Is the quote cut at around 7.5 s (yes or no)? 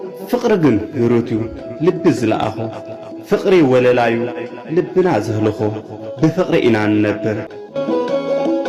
yes